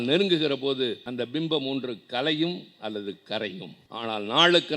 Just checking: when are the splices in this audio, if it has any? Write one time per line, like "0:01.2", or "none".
0:01.0
0:03.8